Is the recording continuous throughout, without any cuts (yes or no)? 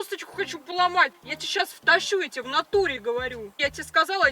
no